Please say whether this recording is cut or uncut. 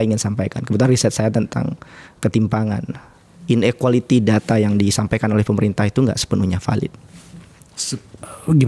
uncut